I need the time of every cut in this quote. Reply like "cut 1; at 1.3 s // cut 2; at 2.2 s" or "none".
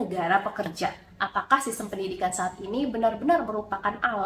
cut 1; at 1.0 s